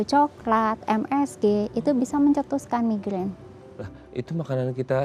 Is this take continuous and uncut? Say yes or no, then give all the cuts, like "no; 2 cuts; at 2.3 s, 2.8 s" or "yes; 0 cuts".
yes; 0 cuts